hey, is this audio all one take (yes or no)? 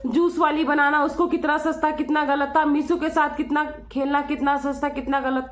yes